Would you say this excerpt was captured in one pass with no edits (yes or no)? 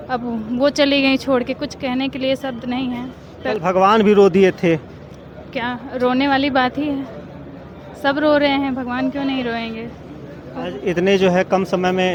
yes